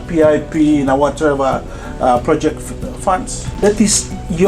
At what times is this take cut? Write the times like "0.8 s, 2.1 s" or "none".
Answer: 3.4 s